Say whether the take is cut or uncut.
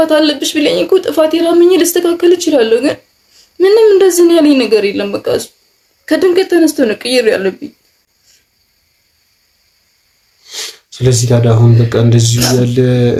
uncut